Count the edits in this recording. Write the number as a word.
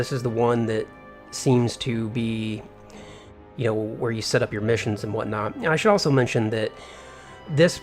one